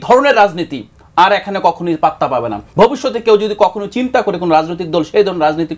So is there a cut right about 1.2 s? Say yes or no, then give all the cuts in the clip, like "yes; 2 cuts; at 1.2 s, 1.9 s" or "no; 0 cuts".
no; 1 cut; at 2.6 s